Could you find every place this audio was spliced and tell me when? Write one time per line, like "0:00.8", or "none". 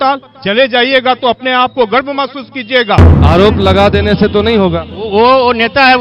0:03.1